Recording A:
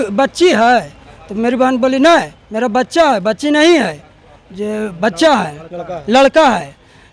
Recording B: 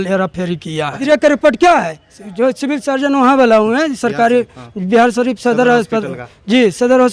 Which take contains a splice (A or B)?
B